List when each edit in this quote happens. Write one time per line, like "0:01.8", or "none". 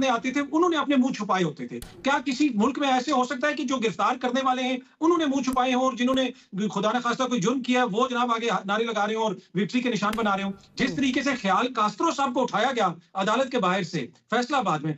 none